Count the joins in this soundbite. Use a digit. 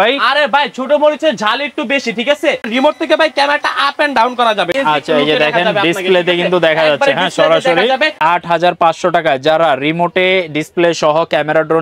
3